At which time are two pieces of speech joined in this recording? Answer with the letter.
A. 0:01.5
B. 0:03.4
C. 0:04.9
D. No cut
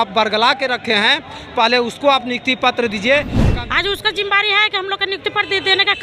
B